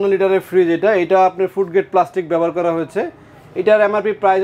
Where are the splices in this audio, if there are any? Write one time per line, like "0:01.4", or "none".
none